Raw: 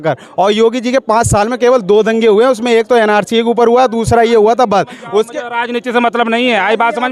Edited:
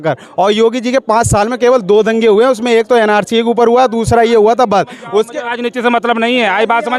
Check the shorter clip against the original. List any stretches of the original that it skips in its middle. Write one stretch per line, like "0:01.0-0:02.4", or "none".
0:05.4-0:05.5